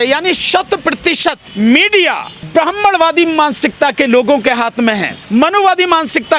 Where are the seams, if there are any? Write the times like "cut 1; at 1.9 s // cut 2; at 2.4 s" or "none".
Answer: cut 1; at 1.4 s // cut 2; at 2.3 s // cut 3; at 5.1 s